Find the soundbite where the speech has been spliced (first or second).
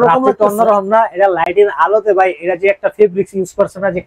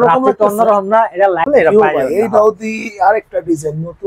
second